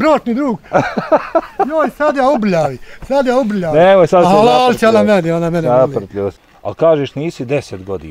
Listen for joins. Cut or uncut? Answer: cut